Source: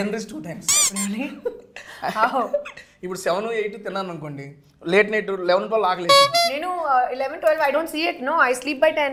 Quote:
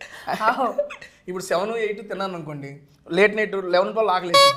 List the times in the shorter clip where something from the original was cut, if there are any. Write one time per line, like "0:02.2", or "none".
none